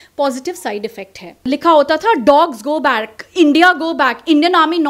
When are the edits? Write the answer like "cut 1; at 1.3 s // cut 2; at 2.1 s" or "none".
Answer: cut 1; at 1.5 s